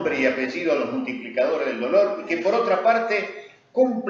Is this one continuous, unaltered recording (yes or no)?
no